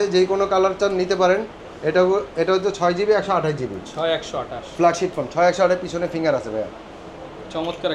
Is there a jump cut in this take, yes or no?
no